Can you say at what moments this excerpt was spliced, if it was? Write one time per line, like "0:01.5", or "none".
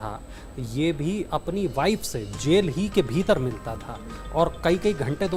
none